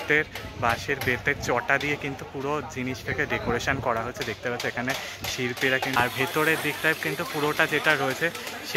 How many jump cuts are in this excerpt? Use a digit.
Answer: 1